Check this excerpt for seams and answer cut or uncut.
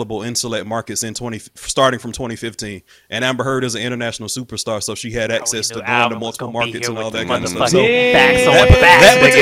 uncut